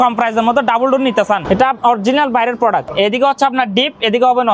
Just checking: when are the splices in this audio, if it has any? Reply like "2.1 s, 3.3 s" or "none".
1.4 s, 2.9 s